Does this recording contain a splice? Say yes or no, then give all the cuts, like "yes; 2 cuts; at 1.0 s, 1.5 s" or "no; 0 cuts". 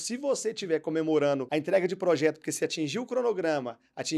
yes; 1 cut; at 1.5 s